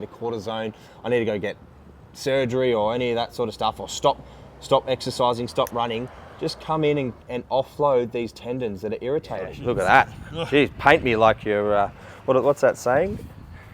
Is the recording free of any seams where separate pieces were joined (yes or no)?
no